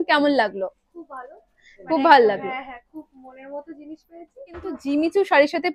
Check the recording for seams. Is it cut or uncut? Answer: cut